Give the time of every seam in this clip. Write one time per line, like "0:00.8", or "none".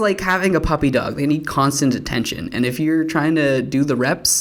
none

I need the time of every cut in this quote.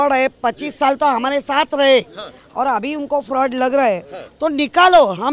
none

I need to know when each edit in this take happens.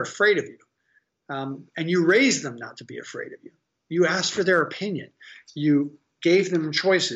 none

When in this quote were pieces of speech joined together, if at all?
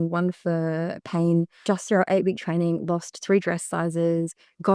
0:01.5

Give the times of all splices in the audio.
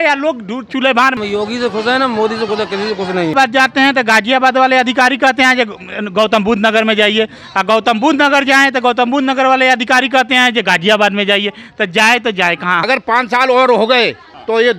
0:01.2
0:03.3
0:12.8

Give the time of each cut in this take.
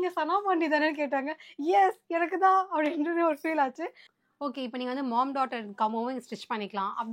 0:04.1

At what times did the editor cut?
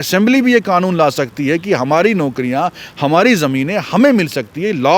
none

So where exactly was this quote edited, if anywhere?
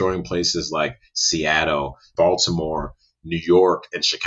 0:02.1

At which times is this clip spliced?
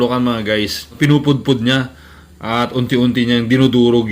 0:00.9

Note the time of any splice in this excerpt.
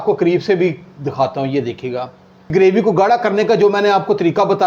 0:02.5

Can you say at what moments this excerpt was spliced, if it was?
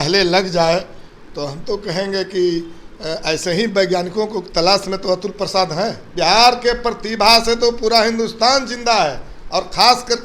0:06.0

